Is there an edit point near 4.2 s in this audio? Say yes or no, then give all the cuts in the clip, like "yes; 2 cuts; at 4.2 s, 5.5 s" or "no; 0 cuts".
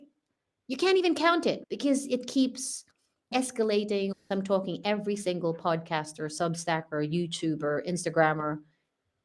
yes; 1 cut; at 4.2 s